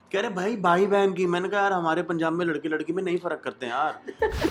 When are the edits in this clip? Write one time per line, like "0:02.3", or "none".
none